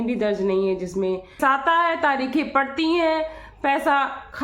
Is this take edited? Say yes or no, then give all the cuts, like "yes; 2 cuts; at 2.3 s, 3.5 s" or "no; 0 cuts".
yes; 1 cut; at 1.4 s